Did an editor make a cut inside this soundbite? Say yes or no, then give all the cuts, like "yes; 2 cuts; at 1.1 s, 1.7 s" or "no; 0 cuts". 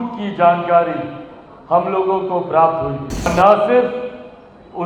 yes; 1 cut; at 3.3 s